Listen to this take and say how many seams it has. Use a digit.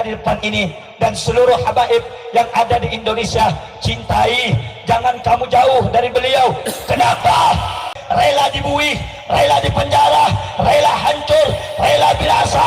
1